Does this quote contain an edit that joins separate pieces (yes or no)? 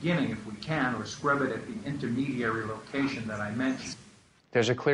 yes